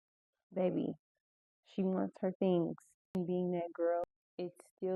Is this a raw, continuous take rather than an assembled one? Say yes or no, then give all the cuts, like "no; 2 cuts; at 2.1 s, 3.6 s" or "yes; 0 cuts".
no; 2 cuts; at 3.1 s, 4.1 s